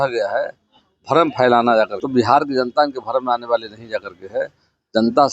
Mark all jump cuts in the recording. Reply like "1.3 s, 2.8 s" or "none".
2.0 s